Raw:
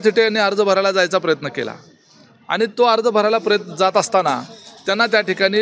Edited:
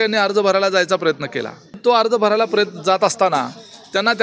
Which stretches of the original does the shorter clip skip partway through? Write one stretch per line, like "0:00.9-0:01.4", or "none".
0:02.0-0:02.7

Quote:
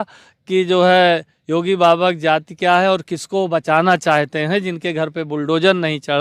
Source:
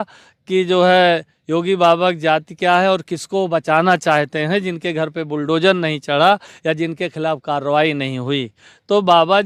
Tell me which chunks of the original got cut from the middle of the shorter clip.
none

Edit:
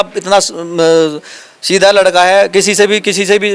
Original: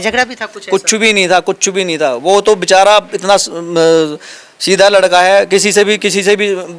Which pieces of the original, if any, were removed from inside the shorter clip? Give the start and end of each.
none

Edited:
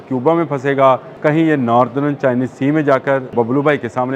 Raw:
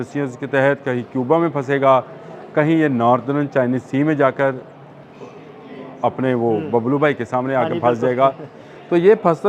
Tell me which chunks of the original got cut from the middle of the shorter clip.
0:02.1-0:02.4
0:04.6-0:06.7

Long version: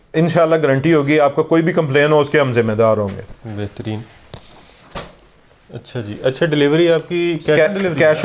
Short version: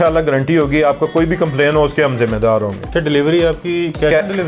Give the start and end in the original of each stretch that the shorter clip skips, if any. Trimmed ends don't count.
0:03.3-0:06.4

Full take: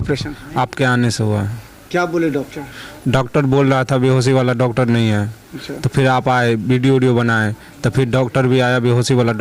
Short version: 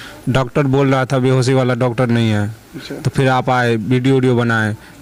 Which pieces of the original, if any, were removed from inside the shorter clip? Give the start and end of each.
none

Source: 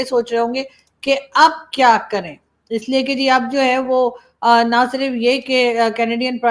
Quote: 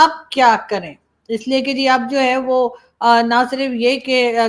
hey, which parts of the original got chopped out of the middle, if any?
none

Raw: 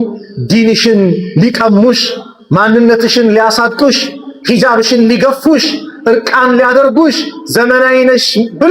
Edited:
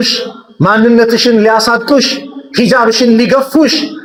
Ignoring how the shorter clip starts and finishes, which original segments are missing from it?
none

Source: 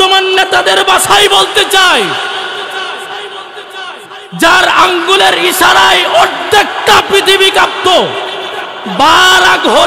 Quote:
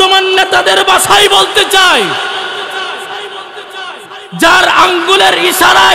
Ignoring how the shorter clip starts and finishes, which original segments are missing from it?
none

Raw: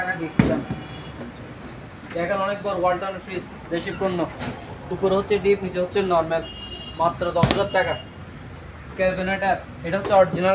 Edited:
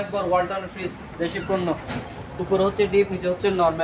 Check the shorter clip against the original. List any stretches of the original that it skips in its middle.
none

